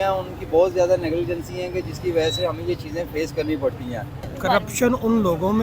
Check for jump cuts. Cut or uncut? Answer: cut